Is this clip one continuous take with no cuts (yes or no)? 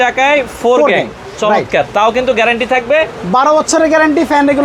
yes